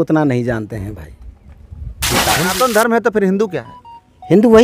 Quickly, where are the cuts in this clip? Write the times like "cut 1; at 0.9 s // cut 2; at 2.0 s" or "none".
cut 1; at 2.3 s